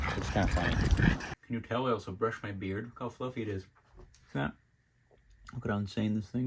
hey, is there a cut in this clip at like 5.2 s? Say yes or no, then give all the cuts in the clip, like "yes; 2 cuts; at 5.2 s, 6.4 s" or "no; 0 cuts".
no; 1 cut; at 1.3 s